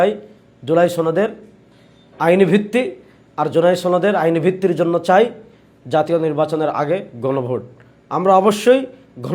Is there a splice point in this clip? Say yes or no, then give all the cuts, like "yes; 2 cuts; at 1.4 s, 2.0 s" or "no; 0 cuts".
no; 0 cuts